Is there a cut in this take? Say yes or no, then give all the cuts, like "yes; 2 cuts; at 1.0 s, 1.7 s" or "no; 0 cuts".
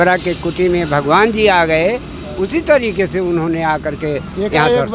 no; 0 cuts